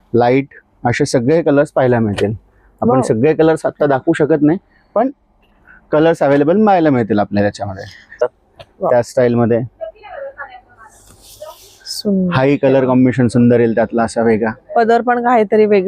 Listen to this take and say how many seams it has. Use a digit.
1